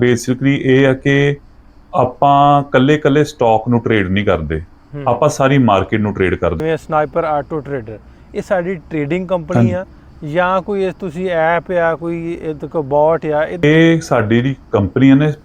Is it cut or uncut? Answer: cut